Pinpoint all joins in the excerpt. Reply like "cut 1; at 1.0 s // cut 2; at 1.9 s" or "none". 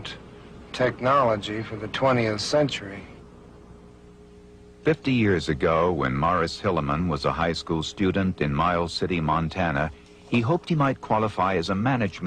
cut 1; at 3.6 s